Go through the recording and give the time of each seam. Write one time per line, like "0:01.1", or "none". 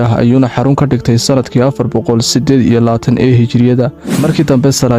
0:04.0